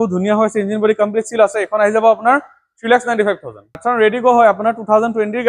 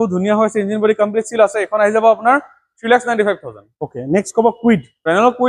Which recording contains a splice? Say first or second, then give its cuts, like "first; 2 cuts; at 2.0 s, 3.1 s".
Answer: first; 1 cut; at 3.7 s